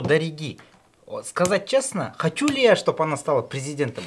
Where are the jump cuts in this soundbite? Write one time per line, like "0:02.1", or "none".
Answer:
none